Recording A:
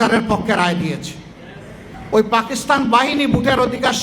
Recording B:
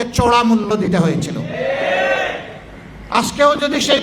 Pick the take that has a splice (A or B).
A